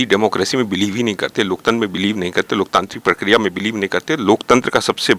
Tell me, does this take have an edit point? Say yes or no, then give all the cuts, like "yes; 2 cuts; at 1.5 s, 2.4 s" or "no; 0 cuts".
no; 0 cuts